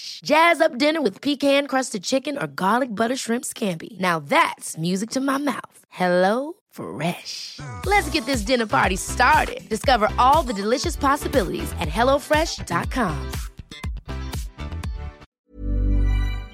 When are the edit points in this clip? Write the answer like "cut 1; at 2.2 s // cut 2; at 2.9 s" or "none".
cut 1; at 15.3 s